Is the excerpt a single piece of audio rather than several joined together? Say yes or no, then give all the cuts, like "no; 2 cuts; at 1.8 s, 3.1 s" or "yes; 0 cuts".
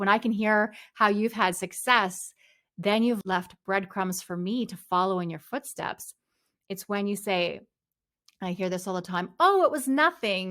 no; 1 cut; at 3.2 s